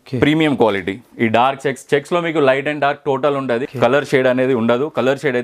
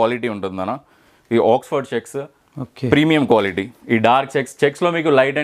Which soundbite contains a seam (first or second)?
first